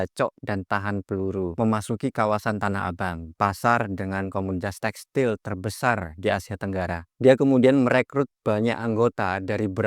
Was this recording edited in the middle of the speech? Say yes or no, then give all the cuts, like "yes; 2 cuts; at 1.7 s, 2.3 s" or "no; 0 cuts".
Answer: yes; 2 cuts; at 1.6 s, 7.1 s